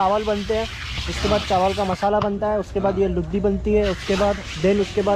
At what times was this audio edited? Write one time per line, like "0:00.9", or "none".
none